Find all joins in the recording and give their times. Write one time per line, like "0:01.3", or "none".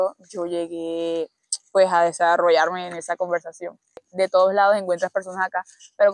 0:04.0

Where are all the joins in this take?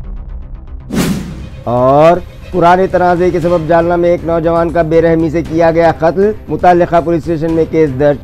0:01.5

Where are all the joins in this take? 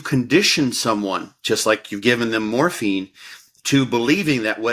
none

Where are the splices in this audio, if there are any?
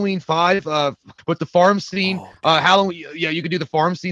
0:01.1

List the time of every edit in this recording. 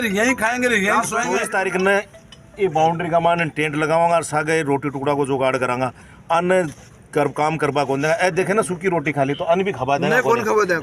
0:01.4

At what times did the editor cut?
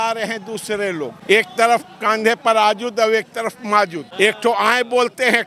0:01.2
0:04.0

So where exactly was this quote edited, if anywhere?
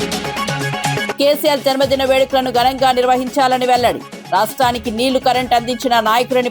0:01.1

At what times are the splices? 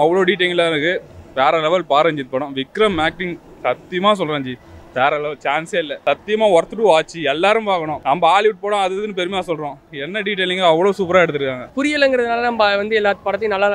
0:05.9
0:07.9
0:11.6

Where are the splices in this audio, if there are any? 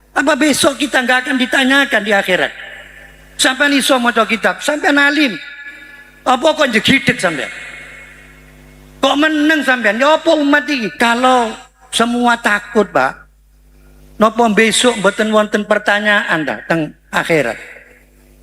0:10.9

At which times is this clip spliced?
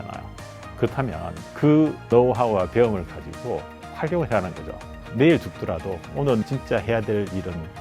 0:04.9
0:06.4

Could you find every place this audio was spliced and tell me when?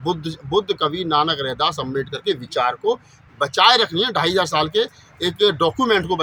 none

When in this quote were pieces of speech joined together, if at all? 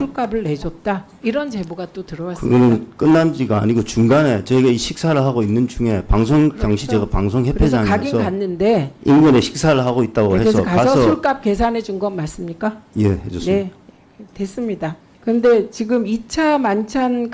none

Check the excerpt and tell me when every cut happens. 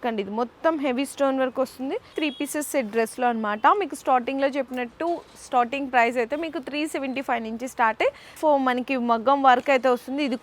0:02.1
0:08.4

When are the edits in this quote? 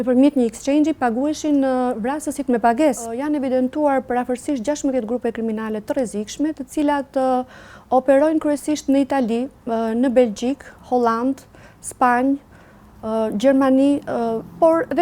0:03.1

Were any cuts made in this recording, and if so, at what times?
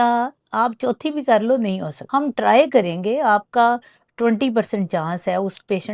0:01.9

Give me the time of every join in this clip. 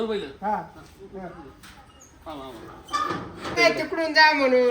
0:03.6

